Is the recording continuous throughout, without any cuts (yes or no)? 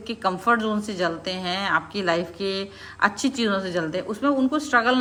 yes